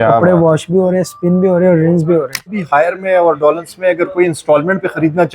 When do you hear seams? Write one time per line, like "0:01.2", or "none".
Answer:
0:02.5

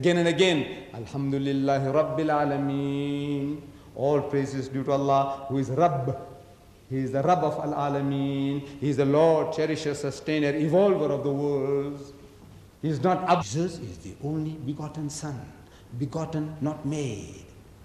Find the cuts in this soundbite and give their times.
none

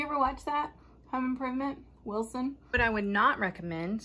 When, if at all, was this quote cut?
0:02.7

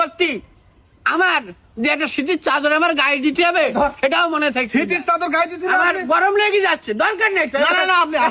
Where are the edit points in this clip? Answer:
none

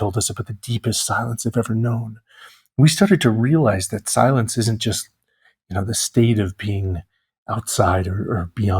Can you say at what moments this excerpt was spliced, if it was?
none

